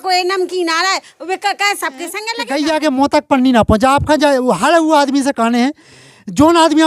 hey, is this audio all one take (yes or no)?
no